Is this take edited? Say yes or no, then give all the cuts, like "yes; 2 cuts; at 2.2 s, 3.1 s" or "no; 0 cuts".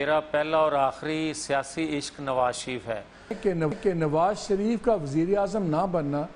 yes; 1 cut; at 3.4 s